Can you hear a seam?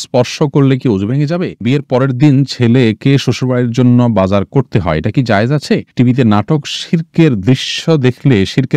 yes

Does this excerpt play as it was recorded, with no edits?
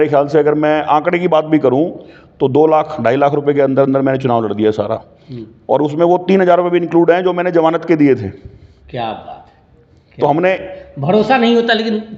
yes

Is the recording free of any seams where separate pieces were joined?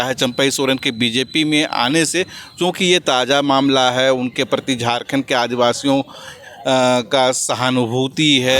yes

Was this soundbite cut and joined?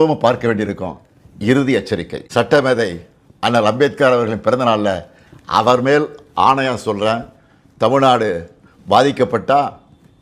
yes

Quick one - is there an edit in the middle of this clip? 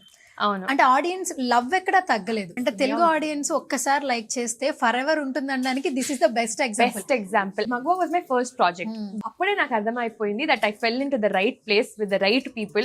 yes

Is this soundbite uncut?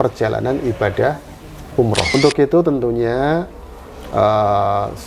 no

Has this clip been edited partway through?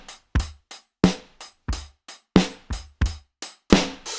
no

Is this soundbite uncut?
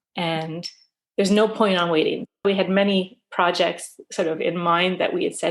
no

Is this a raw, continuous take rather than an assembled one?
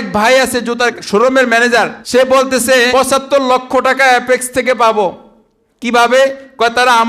no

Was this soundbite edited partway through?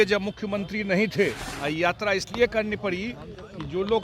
yes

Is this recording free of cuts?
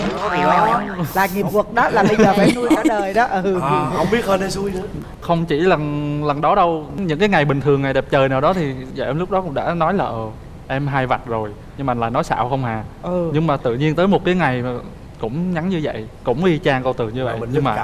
no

